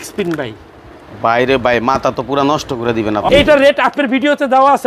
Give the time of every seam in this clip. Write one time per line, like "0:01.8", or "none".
0:03.3